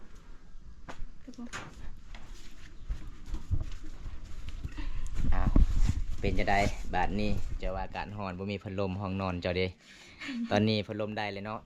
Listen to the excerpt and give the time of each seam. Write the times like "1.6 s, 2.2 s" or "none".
none